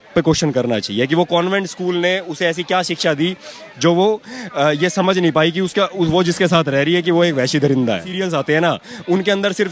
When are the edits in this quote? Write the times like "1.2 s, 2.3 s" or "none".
8.2 s